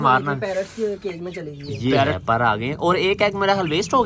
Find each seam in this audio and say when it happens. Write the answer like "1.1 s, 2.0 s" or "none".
2.1 s